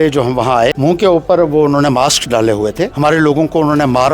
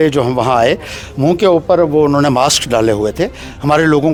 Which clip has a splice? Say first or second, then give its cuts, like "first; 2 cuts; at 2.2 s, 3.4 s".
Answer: first; 2 cuts; at 0.8 s, 2.9 s